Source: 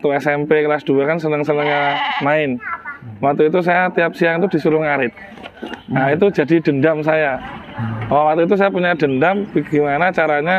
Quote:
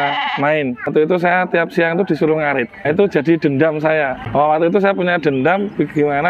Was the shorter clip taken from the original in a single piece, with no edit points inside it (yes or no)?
no